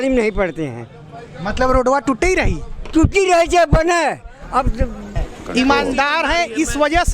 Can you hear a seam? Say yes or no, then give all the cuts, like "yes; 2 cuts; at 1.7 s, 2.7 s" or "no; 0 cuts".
yes; 1 cut; at 5.2 s